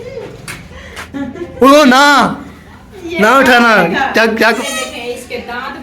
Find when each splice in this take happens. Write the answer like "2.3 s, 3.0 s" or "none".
1.1 s, 4.6 s